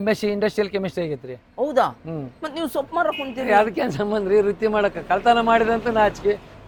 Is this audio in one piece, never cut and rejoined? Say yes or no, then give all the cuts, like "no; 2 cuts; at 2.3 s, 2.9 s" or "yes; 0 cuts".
yes; 0 cuts